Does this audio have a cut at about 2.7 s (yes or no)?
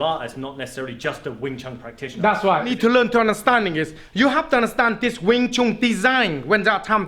yes